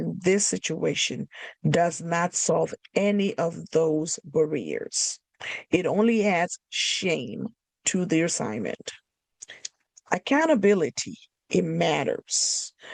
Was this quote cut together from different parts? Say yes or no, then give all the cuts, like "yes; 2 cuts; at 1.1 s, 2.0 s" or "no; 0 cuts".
no; 0 cuts